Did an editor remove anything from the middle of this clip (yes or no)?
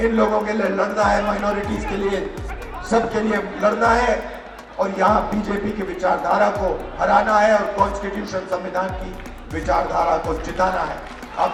no